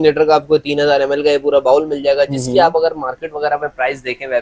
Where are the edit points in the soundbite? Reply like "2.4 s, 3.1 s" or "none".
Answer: none